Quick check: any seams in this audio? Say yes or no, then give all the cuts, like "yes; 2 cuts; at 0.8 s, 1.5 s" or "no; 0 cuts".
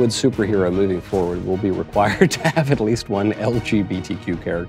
no; 0 cuts